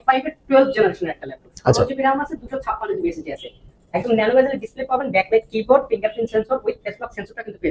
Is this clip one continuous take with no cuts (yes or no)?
yes